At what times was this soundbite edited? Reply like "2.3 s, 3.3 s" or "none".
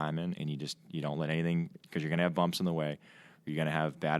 none